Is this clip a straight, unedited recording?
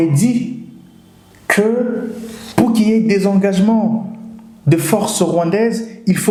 yes; 0 cuts

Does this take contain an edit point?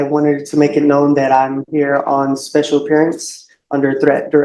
no; 0 cuts

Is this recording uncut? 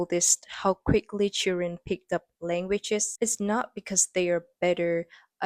yes; 0 cuts

